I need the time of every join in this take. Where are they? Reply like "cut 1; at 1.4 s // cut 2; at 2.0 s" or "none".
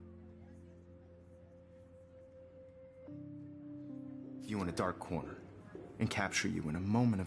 cut 1; at 4.5 s